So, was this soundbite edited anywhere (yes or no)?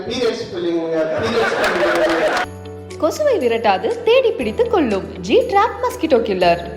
yes